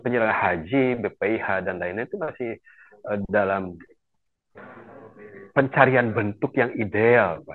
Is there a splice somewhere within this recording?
no; 0 cuts

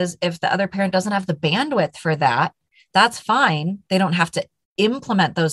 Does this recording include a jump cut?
no; 0 cuts

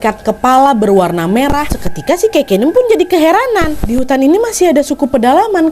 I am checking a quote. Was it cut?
yes; 2 cuts; at 1.8 s, 3.7 s

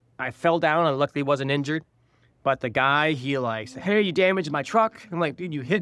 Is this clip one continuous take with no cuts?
yes; 0 cuts

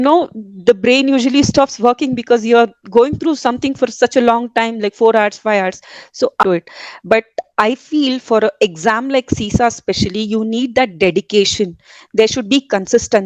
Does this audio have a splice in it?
yes; 1 cut; at 6.4 s

